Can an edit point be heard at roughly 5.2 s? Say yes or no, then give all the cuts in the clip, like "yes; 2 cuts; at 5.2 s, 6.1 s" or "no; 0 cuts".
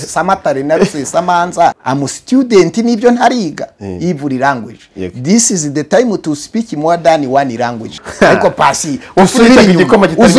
no; 2 cuts; at 1.8 s, 7.9 s